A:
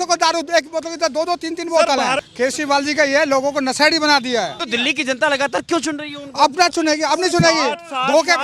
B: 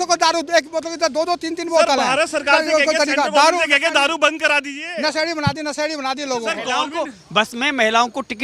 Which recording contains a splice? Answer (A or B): A